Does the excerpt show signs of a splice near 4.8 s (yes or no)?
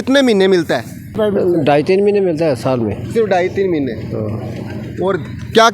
no